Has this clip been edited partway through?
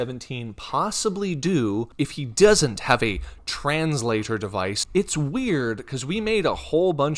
yes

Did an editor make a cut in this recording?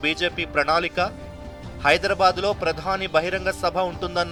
no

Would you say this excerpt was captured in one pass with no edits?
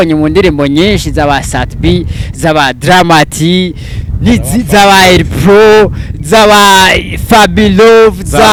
yes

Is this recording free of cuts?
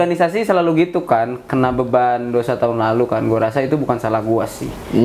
yes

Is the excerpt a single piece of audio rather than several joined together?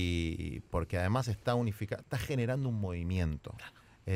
yes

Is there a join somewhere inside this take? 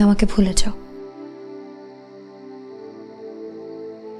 no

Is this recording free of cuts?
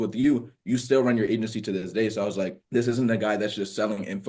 no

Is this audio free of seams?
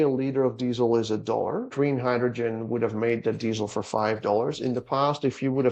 no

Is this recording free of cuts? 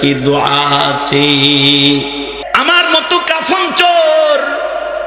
no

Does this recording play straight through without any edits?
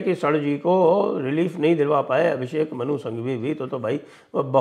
yes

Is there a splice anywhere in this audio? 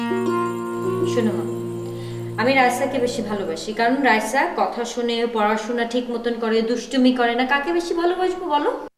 no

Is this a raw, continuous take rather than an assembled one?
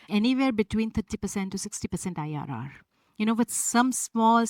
yes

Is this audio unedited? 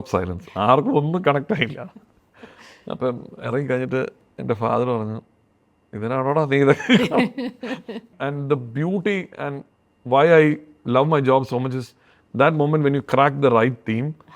no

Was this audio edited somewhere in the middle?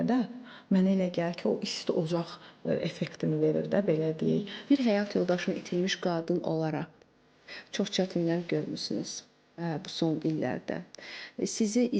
yes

